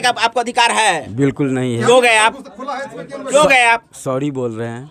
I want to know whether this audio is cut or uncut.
uncut